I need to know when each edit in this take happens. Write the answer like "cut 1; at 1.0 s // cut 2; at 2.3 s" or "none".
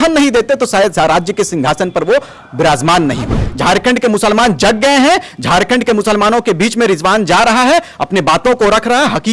cut 1; at 3.4 s